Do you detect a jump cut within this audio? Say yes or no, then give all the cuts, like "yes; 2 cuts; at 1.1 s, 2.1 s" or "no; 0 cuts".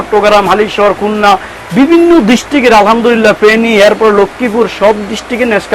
no; 0 cuts